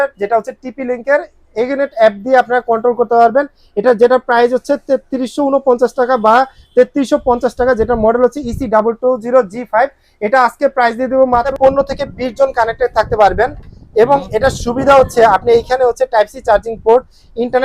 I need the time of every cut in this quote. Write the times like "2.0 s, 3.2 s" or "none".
11.5 s